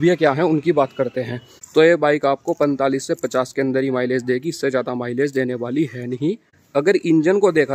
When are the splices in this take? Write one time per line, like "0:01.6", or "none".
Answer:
0:01.5
0:06.6